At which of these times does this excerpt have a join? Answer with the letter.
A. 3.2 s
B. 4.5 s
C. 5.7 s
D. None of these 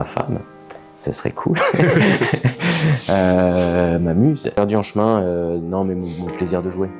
B